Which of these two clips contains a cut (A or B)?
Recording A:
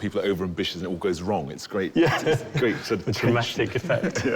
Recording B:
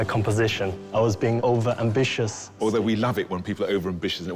B